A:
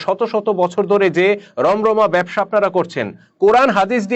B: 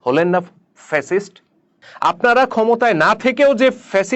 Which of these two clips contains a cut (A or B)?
B